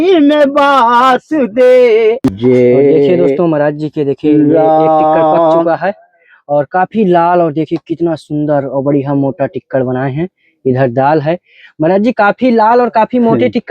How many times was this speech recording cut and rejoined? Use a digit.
1